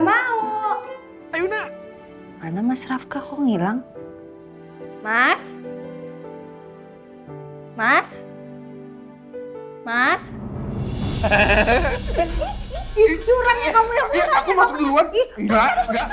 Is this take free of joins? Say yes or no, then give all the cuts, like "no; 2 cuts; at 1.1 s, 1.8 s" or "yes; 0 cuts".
no; 1 cut; at 1.6 s